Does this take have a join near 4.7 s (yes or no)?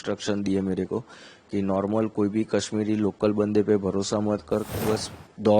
yes